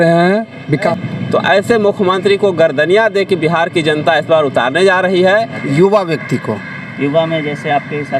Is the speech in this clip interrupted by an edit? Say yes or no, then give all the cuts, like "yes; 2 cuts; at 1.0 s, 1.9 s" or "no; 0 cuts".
yes; 2 cuts; at 0.9 s, 5.6 s